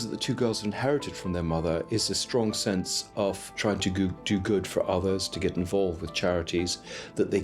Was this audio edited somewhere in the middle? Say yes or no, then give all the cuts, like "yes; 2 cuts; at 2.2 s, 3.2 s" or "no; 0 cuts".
yes; 1 cut; at 3.5 s